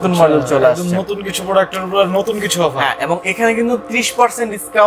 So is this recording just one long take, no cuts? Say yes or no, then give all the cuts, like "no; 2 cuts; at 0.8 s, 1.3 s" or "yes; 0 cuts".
yes; 0 cuts